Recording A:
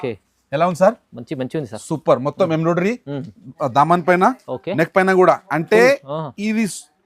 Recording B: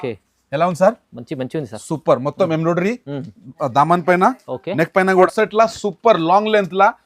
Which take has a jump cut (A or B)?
B